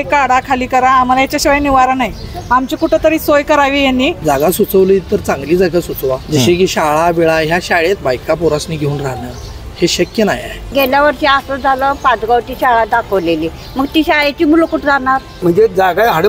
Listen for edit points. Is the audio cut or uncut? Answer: cut